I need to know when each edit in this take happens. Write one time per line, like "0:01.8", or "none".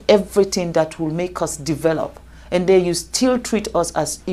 none